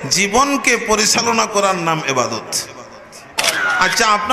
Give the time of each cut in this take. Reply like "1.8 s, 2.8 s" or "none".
3.4 s